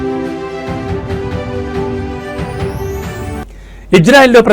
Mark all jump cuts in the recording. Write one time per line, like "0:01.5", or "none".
0:03.4